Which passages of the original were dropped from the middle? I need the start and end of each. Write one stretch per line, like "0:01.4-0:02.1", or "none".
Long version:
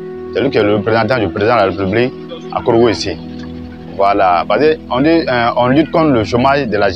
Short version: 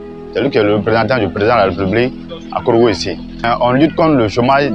0:03.4-0:05.4

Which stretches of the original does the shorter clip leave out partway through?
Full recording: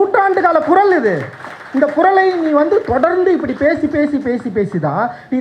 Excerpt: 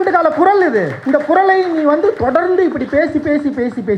0:01.3-0:01.6

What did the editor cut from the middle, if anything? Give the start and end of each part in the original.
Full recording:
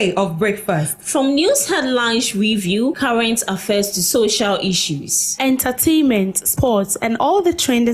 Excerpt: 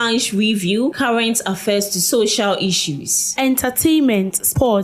none

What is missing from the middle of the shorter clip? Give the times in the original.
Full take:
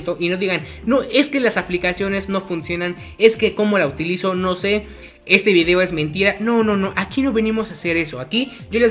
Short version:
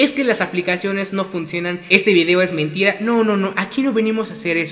0:03.0-0:05.2

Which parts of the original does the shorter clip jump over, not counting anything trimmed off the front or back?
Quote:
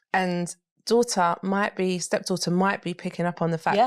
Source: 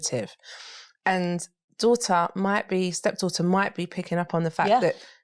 none

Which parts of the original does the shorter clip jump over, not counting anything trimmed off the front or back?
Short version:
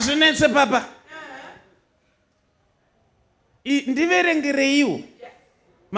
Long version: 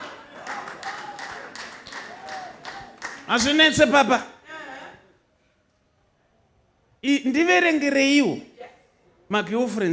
none

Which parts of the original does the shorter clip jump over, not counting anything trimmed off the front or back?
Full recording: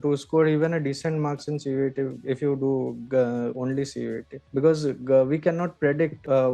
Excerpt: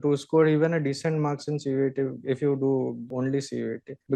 0:03.1-0:03.5

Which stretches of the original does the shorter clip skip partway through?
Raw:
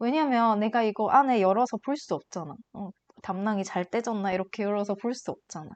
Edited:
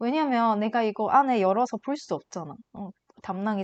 none

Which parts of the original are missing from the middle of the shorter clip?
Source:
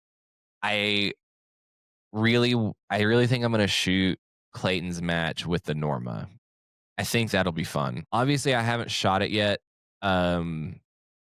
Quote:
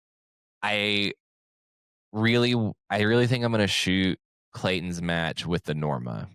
none

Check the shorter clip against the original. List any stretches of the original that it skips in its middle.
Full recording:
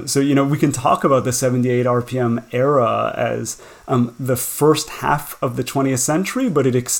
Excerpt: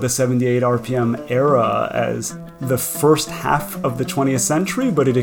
0:03.8-0:04.2

